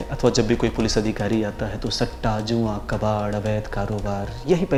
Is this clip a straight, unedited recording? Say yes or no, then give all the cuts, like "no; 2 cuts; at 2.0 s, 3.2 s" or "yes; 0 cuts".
yes; 0 cuts